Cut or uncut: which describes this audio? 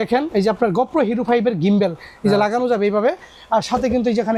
uncut